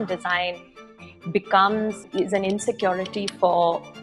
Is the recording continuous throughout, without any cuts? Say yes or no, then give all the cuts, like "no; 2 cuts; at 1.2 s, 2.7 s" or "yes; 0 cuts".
no; 1 cut; at 2.0 s